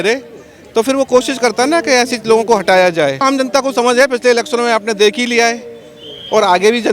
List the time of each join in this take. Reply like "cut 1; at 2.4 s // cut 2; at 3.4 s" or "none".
cut 1; at 3.2 s